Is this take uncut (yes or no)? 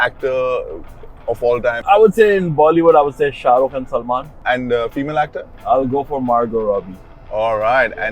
no